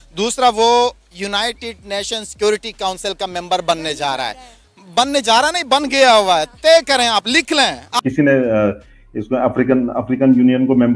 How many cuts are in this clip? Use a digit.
1